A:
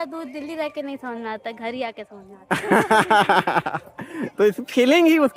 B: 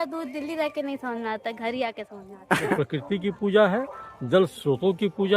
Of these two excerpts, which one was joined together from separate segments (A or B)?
B